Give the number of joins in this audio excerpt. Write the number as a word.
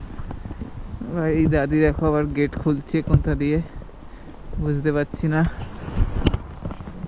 zero